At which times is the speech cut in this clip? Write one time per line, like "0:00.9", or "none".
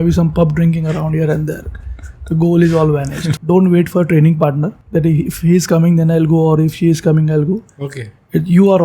0:03.3
0:04.7